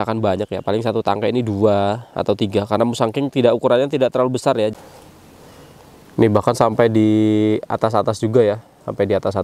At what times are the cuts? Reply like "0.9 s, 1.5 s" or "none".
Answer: 4.7 s